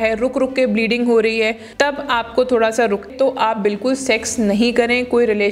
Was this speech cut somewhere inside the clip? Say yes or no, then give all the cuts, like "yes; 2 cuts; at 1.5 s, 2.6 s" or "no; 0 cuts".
yes; 2 cuts; at 1.6 s, 3.1 s